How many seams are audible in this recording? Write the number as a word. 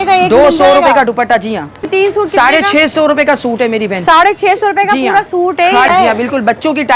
two